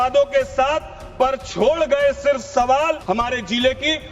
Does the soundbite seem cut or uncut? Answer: cut